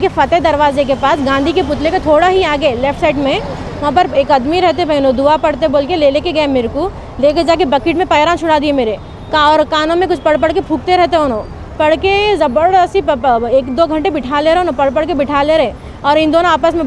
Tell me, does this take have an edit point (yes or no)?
no